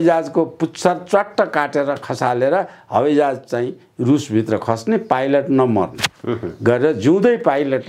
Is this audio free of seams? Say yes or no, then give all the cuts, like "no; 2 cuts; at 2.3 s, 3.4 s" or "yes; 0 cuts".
yes; 0 cuts